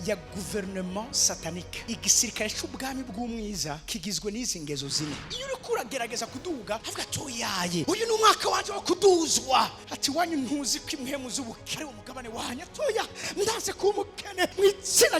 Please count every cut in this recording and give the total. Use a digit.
2